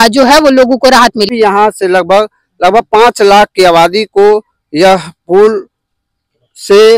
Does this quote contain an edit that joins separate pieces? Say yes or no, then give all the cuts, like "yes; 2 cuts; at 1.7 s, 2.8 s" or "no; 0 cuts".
yes; 1 cut; at 1.3 s